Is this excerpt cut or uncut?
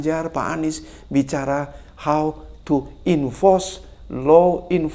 uncut